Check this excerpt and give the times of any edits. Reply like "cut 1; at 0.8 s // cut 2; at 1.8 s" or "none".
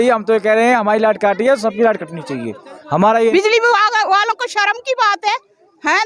cut 1; at 3.3 s